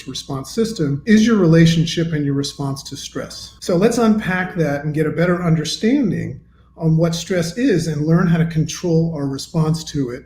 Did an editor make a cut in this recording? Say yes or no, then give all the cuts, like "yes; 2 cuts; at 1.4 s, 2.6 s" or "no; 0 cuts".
yes; 2 cuts; at 1.0 s, 3.4 s